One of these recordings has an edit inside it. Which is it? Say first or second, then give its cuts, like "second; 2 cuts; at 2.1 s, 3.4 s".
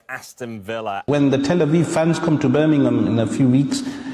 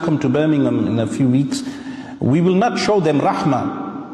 first; 1 cut; at 1.0 s